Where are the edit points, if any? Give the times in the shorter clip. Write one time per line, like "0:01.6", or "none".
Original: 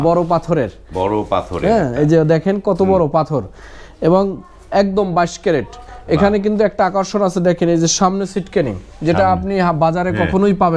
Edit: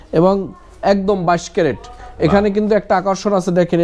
none